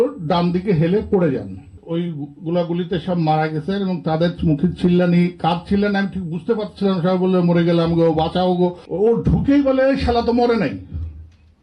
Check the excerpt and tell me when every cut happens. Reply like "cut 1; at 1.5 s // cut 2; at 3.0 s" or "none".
cut 1; at 1.8 s // cut 2; at 8.8 s